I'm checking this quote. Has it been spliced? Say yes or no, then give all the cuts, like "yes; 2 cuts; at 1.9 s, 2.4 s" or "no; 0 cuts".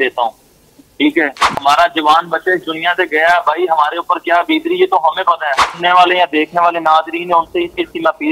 yes; 2 cuts; at 1.5 s, 5.6 s